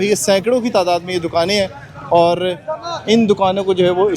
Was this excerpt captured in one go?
yes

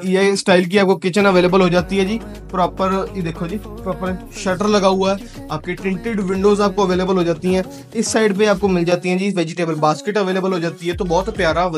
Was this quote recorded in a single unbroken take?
yes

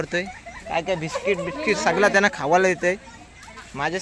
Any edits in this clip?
no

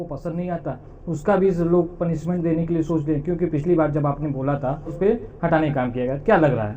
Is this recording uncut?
no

